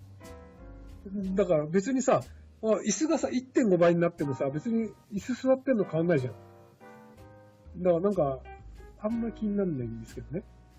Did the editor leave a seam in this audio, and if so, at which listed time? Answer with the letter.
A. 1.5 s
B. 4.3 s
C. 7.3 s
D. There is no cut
B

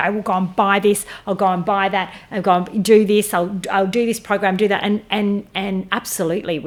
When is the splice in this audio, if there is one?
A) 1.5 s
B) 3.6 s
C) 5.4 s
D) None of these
D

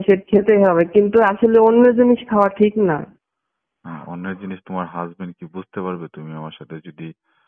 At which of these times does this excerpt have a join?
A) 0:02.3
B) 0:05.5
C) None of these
C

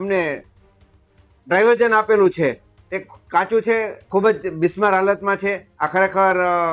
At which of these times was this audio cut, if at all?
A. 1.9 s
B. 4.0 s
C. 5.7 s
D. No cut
B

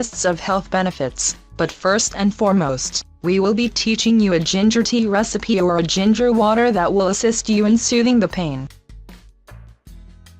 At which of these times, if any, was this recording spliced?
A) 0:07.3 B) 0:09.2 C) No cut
B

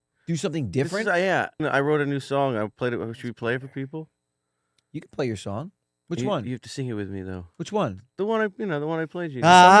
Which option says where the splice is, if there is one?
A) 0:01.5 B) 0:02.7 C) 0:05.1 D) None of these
A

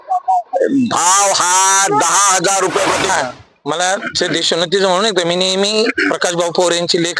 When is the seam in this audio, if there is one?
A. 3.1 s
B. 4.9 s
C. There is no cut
A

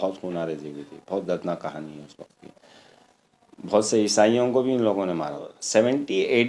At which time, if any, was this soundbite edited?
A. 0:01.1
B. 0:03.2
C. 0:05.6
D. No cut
C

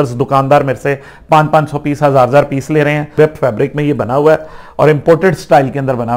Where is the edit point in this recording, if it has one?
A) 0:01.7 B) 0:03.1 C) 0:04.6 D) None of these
B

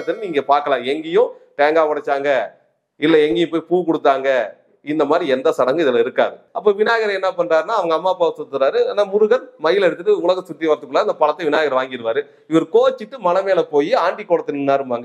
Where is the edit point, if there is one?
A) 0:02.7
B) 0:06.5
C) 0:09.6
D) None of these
B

